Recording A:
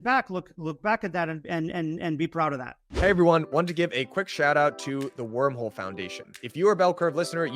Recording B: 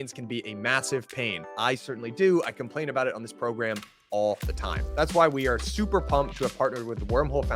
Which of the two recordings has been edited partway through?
A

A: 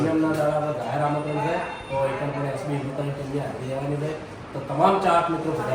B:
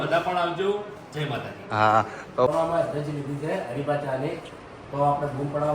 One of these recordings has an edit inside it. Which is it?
B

